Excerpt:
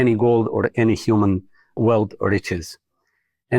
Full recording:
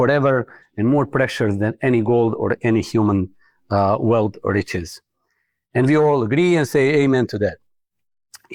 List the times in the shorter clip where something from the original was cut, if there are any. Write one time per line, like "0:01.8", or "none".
0:01.8

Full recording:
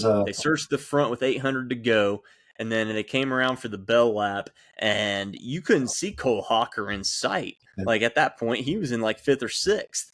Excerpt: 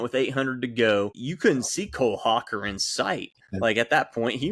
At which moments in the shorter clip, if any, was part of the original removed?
0:01.2

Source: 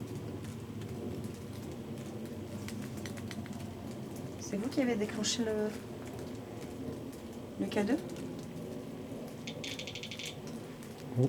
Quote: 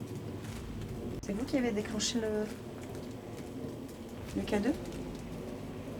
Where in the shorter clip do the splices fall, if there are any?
0:01.2

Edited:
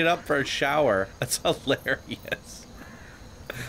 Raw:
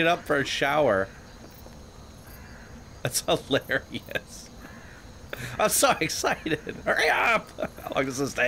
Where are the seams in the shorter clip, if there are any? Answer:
0:01.1

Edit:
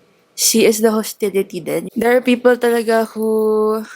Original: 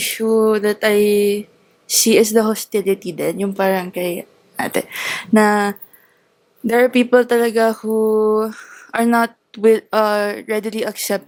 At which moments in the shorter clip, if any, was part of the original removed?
0:01.8

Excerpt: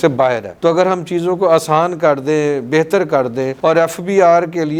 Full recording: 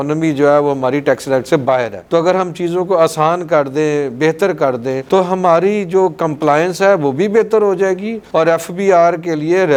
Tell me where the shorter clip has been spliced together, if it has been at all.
0:03.5

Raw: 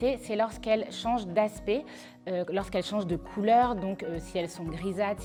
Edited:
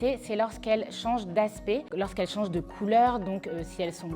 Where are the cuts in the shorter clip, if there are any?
0:01.9

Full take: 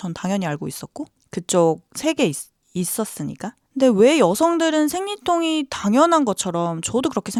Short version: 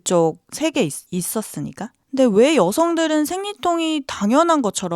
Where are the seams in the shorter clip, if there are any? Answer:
0:01.0

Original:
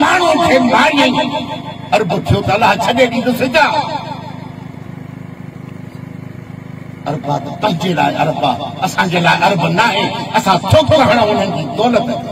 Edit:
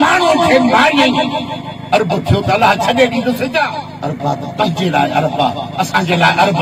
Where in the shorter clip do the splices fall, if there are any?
0:03.8

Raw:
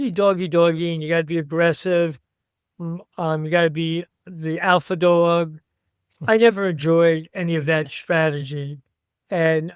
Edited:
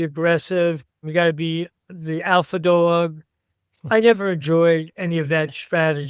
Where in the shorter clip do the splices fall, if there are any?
0:01.1

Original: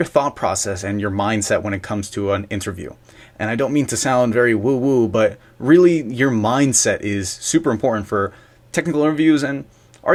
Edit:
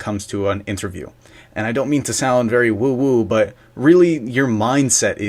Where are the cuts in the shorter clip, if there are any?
none

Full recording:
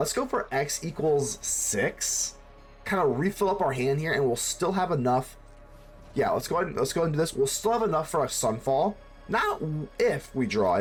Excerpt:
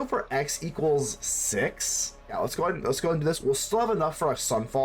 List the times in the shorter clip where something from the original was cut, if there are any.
0:02.3

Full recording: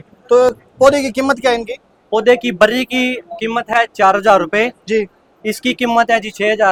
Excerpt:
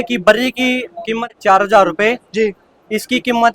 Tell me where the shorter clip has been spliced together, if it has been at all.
0:01.3

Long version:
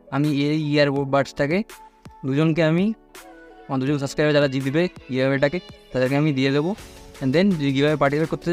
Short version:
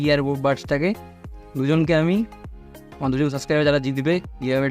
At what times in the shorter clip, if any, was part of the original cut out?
none

